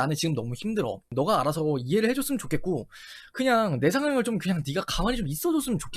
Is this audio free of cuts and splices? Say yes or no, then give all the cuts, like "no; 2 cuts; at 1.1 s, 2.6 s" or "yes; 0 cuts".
no; 1 cut; at 1.1 s